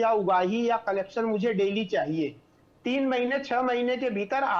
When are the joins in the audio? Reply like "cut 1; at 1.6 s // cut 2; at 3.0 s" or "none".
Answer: none